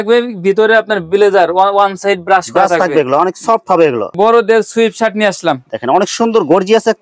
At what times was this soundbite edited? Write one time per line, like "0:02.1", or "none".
0:04.1